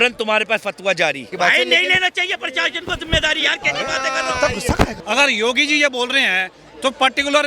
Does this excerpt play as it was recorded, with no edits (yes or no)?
no